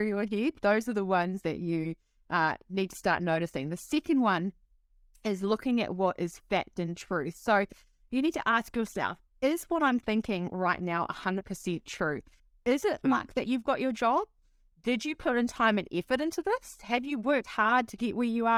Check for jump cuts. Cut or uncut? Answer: uncut